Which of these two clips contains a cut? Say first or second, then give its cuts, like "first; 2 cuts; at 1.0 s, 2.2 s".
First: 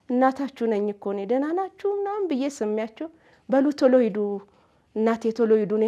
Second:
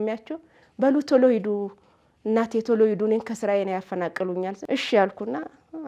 second; 1 cut; at 4.6 s